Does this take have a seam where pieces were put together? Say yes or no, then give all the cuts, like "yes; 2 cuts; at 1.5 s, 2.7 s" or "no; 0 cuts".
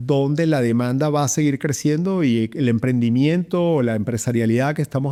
no; 0 cuts